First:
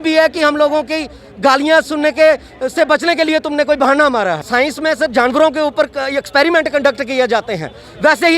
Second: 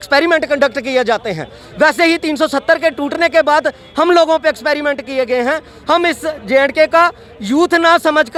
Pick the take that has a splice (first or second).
first